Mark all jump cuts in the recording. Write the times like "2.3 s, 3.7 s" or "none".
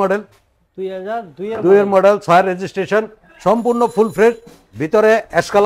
3.2 s